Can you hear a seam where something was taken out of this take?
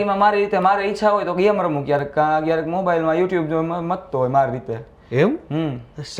no; 0 cuts

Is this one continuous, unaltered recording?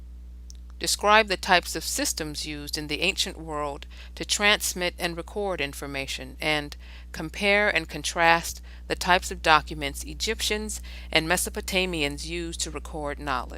no; 1 cut; at 1.7 s

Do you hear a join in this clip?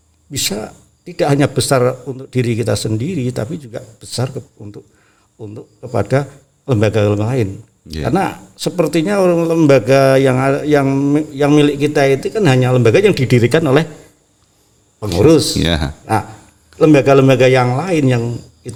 no; 0 cuts

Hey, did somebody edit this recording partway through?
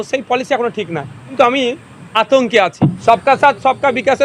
yes; 3 cuts; at 1.3 s, 2.1 s, 3.0 s

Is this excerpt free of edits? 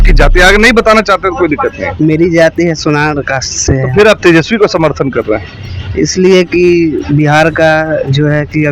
yes; 0 cuts

